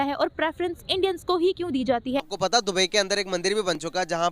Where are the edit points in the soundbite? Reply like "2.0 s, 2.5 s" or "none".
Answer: 2.3 s

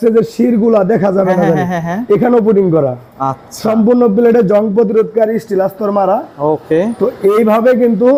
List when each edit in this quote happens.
none

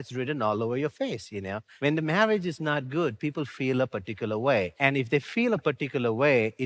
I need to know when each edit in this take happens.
1.7 s

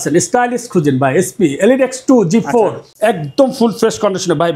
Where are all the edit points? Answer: 2.8 s

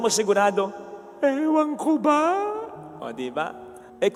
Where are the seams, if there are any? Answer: none

